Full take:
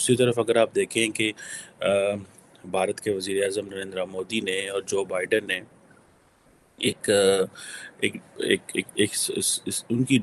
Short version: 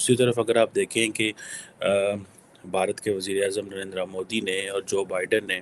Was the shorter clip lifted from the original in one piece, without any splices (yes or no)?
yes